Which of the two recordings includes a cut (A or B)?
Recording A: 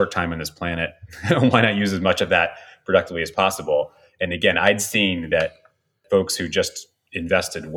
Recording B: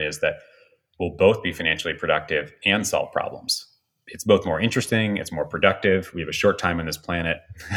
A